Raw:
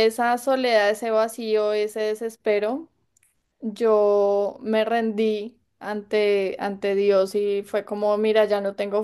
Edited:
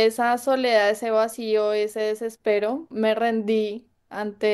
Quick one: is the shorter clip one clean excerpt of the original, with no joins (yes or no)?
no